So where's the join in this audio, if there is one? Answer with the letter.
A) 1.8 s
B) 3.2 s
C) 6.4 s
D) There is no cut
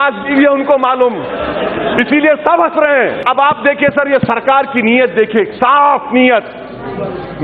B